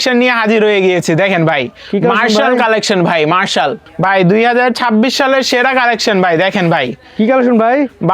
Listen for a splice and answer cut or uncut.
cut